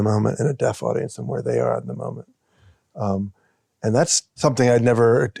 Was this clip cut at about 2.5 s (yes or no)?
no